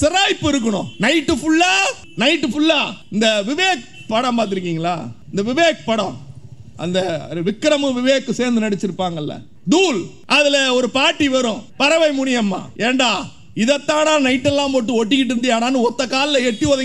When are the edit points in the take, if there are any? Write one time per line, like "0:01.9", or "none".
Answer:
0:00.9
0:02.0
0:03.0
0:05.2
0:09.5
0:10.1
0:11.7
0:12.7